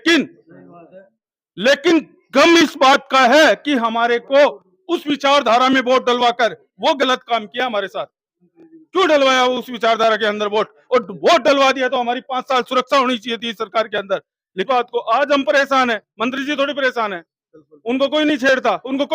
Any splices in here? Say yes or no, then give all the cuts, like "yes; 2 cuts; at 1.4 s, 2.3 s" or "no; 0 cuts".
yes; 1 cut; at 14.7 s